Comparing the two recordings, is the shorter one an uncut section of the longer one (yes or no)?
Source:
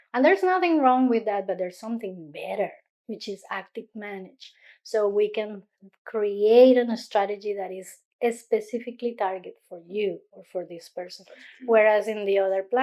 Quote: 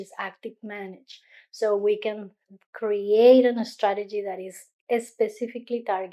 yes